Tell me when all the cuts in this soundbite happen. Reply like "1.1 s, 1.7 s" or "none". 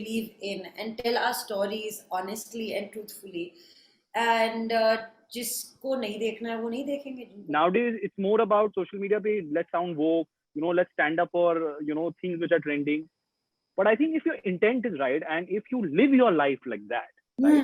7.3 s